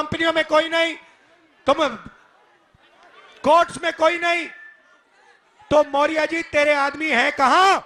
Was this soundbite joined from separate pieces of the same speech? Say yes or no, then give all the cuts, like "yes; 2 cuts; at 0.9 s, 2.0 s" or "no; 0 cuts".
no; 0 cuts